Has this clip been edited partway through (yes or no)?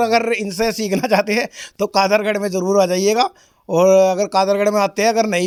no